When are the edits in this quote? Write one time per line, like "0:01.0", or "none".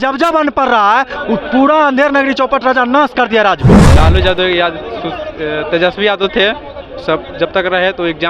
0:03.8

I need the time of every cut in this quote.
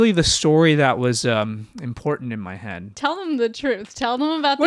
0:02.8

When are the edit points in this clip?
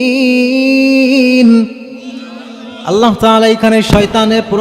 none

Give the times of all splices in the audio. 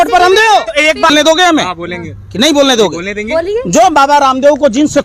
0:01.1

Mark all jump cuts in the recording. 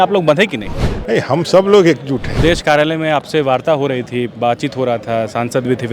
0:02.3

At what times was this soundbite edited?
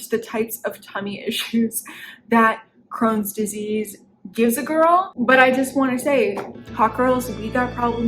0:05.1

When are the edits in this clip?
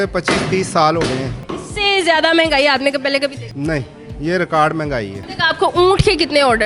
0:01.4
0:03.5
0:05.2

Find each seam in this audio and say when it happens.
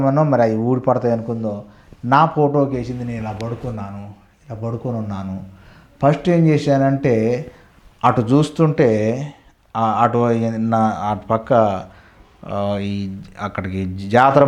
none

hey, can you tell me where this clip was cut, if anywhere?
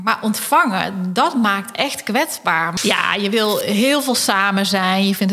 0:02.7

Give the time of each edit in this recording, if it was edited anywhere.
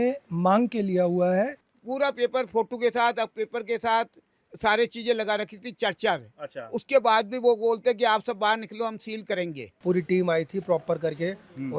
0:01.7
0:09.7

